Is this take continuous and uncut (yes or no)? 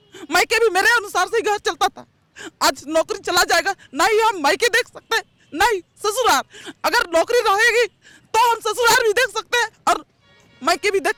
yes